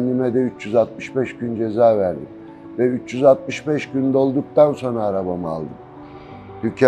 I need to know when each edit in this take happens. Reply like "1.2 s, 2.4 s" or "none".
5.9 s